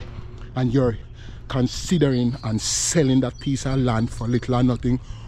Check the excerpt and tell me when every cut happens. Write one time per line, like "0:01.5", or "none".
0:01.1